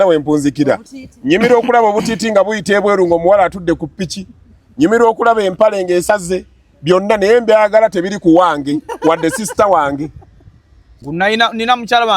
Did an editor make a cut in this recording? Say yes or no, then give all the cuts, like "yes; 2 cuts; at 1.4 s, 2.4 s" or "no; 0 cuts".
yes; 1 cut; at 11.0 s